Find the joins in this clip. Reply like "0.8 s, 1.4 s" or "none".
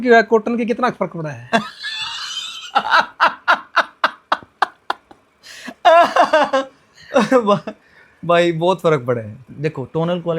9.5 s